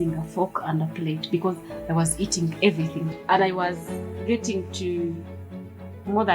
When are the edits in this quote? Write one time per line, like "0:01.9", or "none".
0:03.1